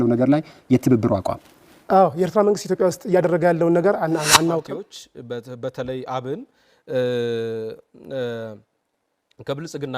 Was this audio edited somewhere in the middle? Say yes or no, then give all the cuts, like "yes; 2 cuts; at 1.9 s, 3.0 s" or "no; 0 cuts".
yes; 1 cut; at 4.7 s